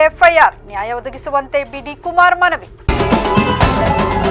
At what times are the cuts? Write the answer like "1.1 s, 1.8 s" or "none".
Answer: 2.7 s